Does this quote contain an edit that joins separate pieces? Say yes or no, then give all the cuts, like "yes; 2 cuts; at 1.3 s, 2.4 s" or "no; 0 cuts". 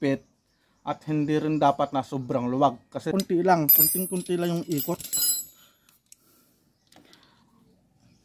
yes; 1 cut; at 3.1 s